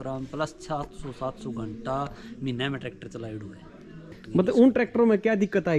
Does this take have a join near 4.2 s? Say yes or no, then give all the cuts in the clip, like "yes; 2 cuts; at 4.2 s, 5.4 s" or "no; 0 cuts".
yes; 1 cut; at 4.2 s